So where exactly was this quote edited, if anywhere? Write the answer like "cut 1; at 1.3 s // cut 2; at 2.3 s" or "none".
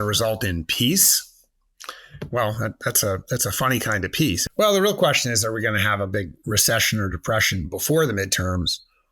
cut 1; at 4.4 s